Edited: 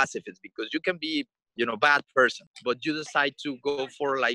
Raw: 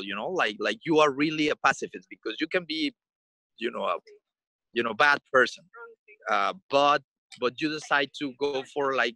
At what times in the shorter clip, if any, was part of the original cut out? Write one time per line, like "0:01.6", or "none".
0:01.4
0:02.5